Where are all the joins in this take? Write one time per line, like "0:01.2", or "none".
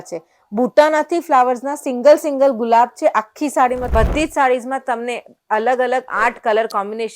0:03.9